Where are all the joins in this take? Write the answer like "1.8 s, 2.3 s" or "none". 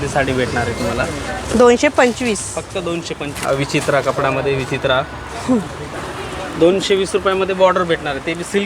3.3 s, 5.9 s